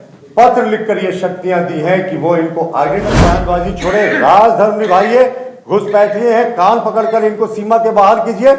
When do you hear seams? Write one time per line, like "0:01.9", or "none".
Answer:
0:03.2